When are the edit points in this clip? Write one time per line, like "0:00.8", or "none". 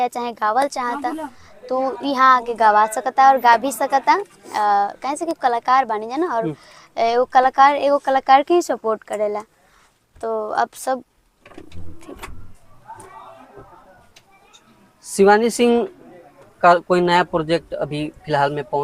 none